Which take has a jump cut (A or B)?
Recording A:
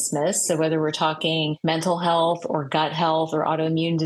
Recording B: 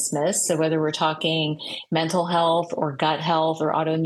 A